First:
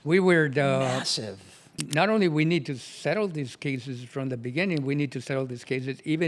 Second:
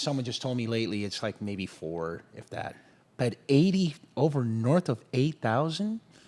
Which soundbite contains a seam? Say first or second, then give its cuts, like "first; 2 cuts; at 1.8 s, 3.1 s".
first; 1 cut; at 1.7 s